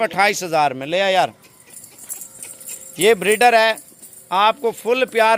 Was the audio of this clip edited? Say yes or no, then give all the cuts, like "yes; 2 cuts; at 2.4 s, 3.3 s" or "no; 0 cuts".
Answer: no; 0 cuts